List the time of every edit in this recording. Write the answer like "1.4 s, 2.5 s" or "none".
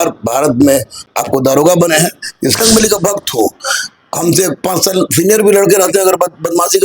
1.1 s, 2.6 s

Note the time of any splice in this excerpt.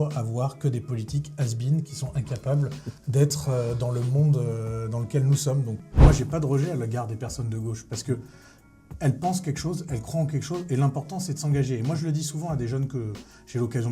5.8 s

